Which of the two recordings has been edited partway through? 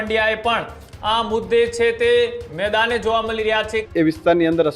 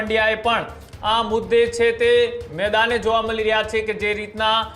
first; 1 cut; at 3.8 s

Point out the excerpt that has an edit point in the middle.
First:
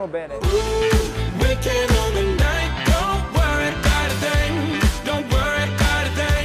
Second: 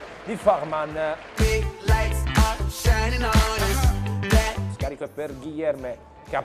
second; 1 cut; at 3.1 s

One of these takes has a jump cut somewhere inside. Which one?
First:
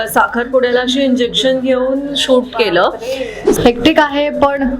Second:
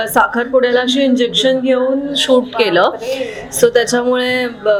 first; 1 cut; at 3.5 s

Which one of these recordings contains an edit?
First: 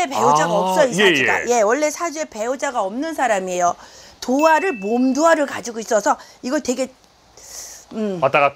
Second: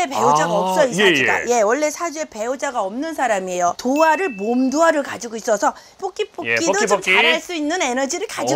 second; 2 cuts; at 3.8 s, 6.0 s

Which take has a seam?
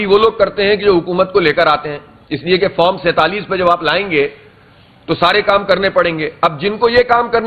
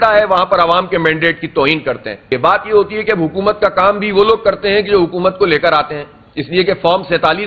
second; 1 cut; at 2.2 s

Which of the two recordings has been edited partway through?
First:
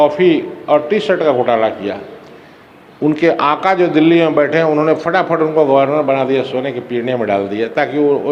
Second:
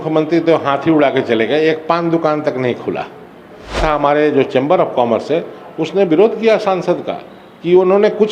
second; 1 cut; at 3.8 s

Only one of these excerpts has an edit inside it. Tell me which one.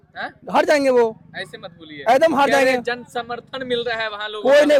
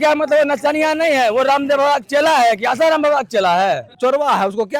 second; 1 cut; at 3.9 s

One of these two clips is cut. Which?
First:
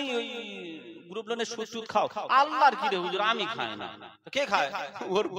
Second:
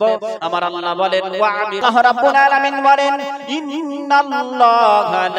second; 1 cut; at 1.8 s

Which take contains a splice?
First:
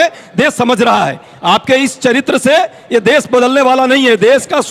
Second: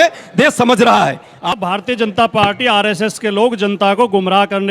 second; 1 cut; at 1.5 s

